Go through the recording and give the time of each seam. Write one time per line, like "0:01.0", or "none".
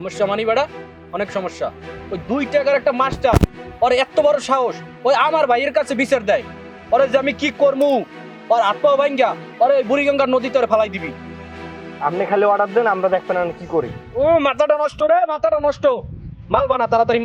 none